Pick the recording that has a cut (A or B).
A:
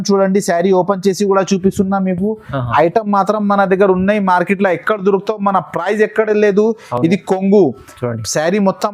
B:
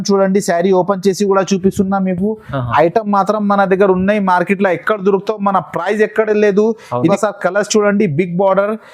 B